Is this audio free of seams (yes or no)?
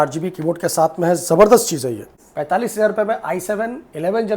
no